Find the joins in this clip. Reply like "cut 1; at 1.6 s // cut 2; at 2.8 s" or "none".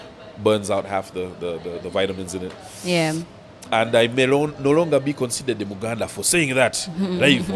none